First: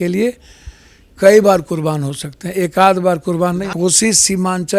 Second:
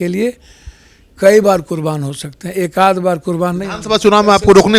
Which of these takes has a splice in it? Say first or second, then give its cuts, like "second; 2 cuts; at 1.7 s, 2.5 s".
first; 1 cut; at 3.7 s